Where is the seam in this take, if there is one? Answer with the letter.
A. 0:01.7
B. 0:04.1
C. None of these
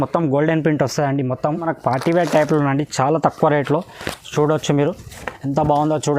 A